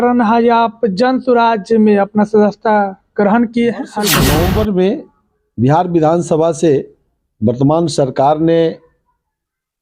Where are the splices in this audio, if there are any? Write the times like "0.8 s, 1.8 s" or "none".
4.1 s